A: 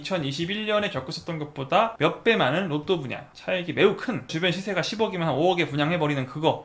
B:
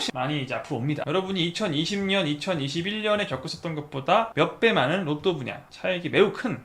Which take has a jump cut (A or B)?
B